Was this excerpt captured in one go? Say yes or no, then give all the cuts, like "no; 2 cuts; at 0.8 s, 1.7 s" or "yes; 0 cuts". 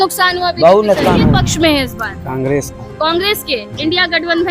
no; 1 cut; at 1.2 s